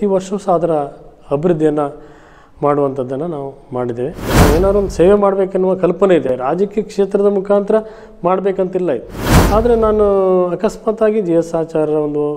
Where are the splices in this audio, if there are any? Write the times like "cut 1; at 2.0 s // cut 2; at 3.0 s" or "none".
cut 1; at 4.3 s // cut 2; at 6.3 s